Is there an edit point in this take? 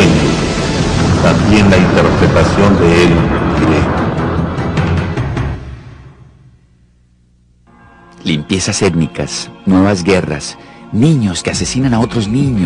yes; 1 cut; at 7.2 s

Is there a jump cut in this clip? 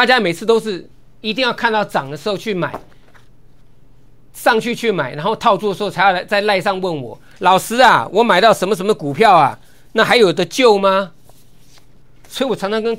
no; 0 cuts

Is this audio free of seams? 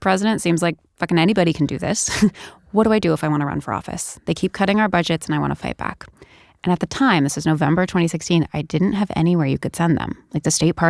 yes; 0 cuts

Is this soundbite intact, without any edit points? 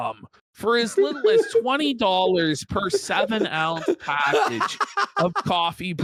yes; 0 cuts

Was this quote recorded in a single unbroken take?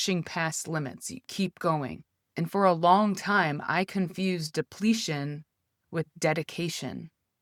yes; 0 cuts

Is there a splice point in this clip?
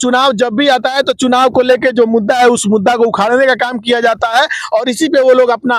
no; 0 cuts

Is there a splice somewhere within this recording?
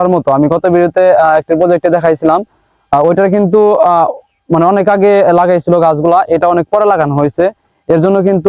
no; 0 cuts

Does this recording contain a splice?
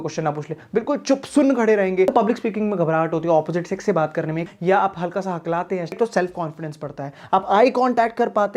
yes; 3 cuts; at 2.1 s, 4.5 s, 6.0 s

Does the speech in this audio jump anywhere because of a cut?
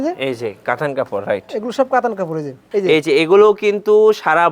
yes; 1 cut; at 2.7 s

